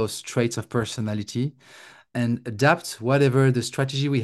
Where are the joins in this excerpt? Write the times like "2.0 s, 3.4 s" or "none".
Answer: 2.1 s